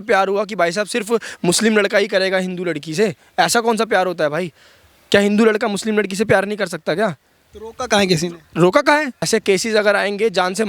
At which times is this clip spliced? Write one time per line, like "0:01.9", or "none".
0:09.3